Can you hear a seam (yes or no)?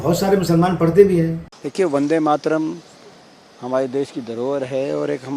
yes